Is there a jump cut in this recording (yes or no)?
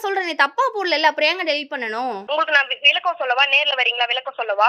yes